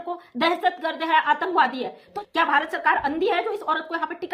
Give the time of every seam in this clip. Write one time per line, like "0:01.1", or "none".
0:02.1